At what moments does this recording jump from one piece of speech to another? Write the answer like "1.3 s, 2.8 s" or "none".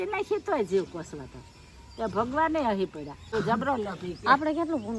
3.2 s